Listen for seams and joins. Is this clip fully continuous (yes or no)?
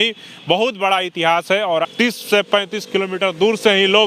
no